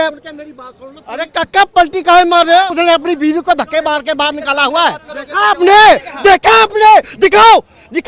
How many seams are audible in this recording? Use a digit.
1